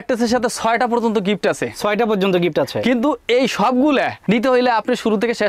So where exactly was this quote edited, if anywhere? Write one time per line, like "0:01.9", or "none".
none